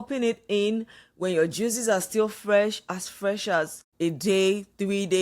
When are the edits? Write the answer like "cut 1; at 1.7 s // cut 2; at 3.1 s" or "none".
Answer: cut 1; at 3.8 s